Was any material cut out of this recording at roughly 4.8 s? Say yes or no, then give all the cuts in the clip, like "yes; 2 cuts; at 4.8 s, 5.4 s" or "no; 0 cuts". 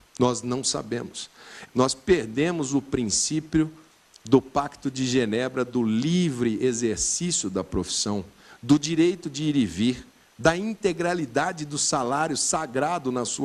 no; 1 cut; at 1.5 s